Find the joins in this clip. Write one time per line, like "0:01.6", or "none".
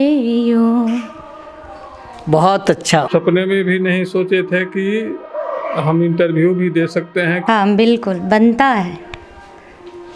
0:03.1
0:07.4